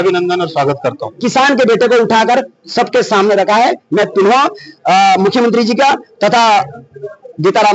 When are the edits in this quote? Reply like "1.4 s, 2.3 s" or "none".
1.2 s